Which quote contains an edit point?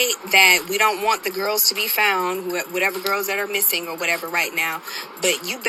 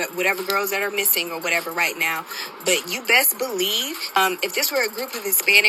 second; 1 cut; at 4.2 s

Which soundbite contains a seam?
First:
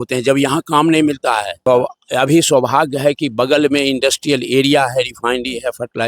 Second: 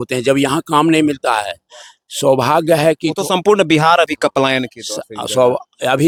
first; 1 cut; at 1.5 s

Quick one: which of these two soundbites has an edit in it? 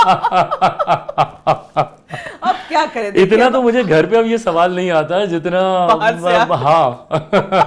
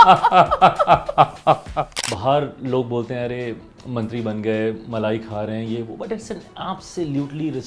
second; 1 cut; at 2.0 s

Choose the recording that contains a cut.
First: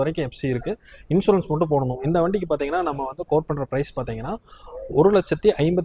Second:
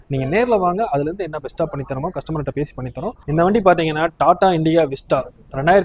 second; 1 cut; at 3.2 s

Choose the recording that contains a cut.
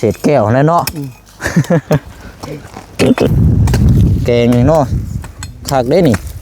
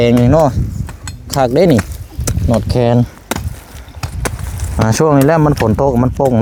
first; 1 cut; at 3.3 s

